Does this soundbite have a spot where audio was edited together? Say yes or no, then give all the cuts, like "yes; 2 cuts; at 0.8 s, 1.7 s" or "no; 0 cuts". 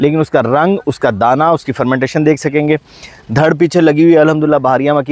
no; 0 cuts